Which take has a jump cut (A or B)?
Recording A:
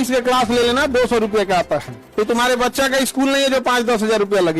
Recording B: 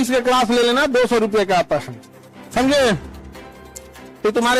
A